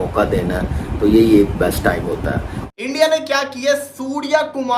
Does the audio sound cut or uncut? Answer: uncut